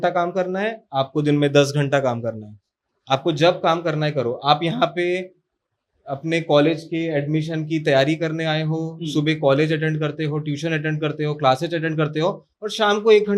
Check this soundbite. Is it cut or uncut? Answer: uncut